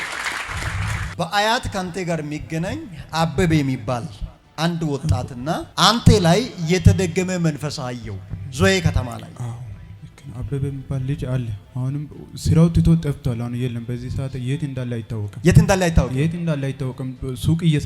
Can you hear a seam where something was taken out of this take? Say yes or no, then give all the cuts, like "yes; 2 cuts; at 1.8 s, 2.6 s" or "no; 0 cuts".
no; 0 cuts